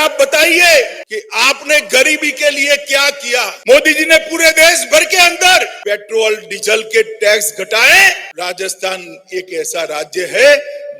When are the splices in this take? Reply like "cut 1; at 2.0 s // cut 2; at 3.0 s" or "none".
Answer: cut 1; at 1.0 s // cut 2; at 3.5 s // cut 3; at 5.7 s // cut 4; at 8.3 s